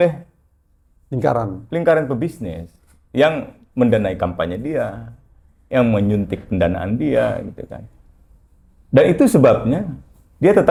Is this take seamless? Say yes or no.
yes